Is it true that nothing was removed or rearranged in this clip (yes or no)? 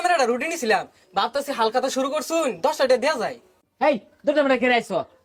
yes